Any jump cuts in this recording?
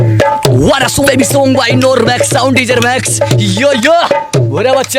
yes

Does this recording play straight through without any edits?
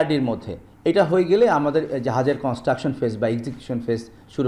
yes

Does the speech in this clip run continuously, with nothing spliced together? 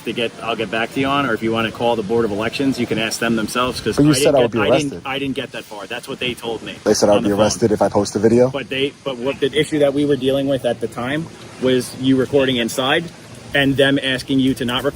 no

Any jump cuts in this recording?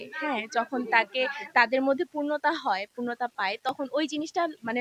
no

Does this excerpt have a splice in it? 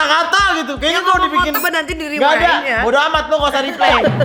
yes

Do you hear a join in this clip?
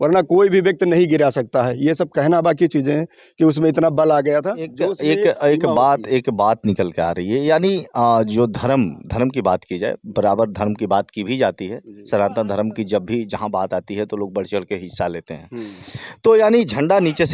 no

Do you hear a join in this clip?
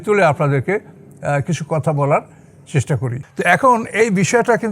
yes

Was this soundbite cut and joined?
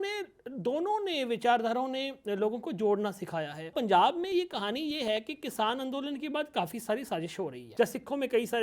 yes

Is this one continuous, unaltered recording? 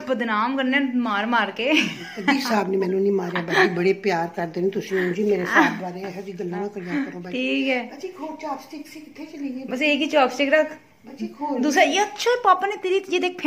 yes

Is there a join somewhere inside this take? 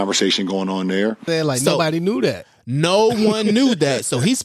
yes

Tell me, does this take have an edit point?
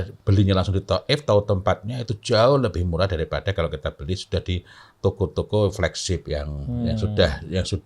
no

